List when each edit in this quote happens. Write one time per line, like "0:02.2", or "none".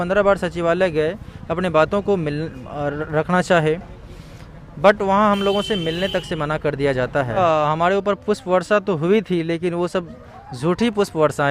0:07.4

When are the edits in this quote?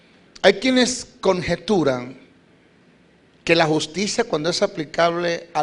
0:03.5

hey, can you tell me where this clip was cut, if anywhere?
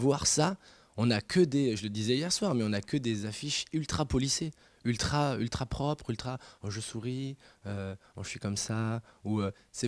none

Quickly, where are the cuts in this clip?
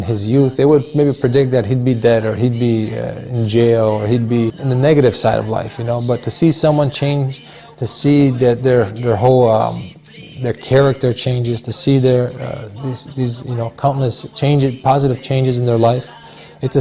0:04.6

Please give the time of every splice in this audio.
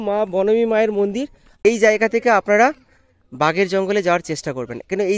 0:01.6

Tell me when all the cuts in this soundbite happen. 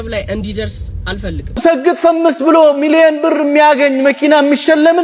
0:01.4

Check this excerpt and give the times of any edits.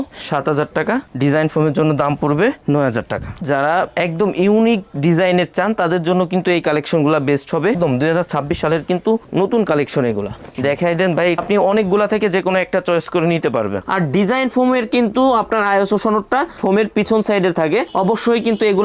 0:03.4
0:07.8
0:11.4
0:13.8

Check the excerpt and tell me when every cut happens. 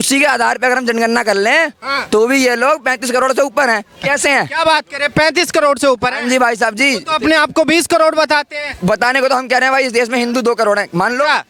none

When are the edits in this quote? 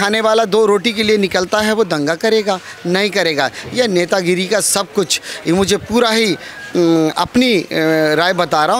none

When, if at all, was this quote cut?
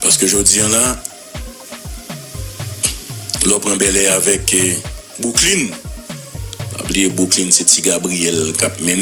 none

